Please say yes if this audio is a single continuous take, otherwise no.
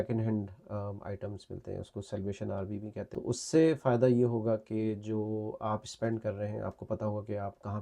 no